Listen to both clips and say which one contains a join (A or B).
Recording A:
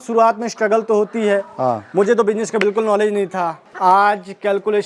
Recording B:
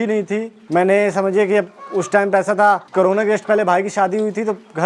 A